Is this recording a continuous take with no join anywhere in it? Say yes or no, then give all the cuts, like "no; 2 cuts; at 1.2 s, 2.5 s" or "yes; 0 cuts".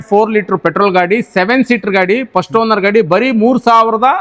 yes; 0 cuts